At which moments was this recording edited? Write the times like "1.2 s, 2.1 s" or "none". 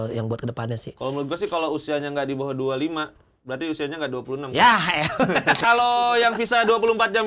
5.6 s